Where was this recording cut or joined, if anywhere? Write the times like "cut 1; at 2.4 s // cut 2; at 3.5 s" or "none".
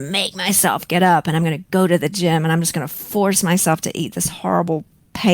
none